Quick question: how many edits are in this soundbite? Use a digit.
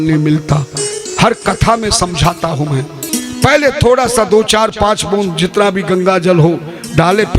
2